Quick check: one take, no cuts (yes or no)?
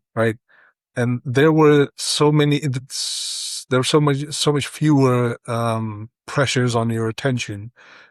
yes